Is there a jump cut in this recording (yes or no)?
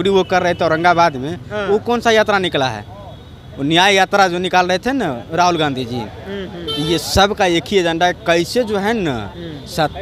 no